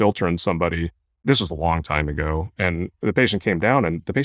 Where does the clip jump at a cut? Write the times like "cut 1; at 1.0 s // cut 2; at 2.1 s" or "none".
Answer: none